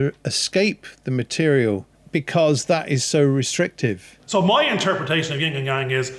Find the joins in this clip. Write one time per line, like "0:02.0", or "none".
0:01.9
0:04.1